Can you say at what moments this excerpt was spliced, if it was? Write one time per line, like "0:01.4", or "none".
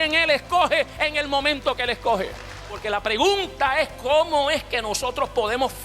0:02.7